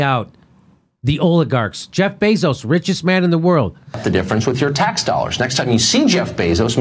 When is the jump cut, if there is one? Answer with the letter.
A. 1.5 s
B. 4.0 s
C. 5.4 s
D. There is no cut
B